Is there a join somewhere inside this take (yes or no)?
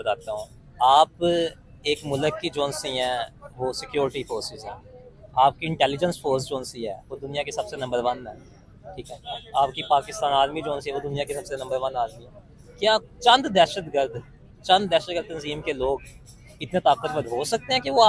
no